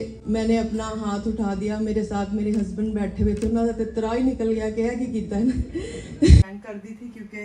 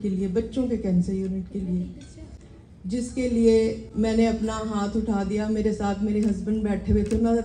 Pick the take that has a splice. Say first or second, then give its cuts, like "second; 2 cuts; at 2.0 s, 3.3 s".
first; 1 cut; at 6.4 s